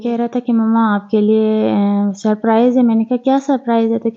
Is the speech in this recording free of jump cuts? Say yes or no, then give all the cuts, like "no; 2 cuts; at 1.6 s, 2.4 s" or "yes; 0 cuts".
yes; 0 cuts